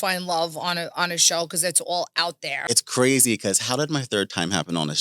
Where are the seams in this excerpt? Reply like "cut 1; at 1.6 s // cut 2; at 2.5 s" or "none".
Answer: cut 1; at 2.6 s